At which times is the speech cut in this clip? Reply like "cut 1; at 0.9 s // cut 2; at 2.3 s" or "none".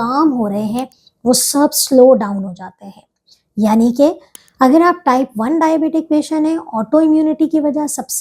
cut 1; at 4.3 s